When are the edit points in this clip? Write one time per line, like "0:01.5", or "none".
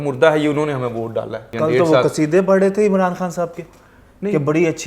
0:01.5